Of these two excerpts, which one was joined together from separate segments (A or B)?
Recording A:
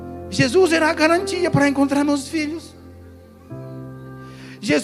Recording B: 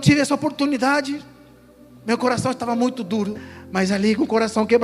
B